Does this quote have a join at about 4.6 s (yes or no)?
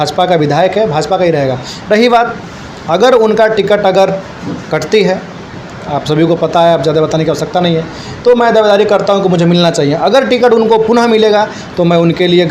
no